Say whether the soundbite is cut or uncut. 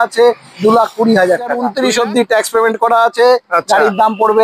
cut